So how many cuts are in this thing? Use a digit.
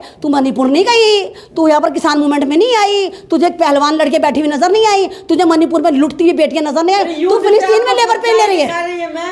0